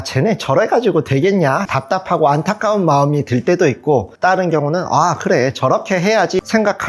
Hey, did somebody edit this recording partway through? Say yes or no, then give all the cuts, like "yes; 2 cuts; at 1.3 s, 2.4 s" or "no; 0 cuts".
no; 0 cuts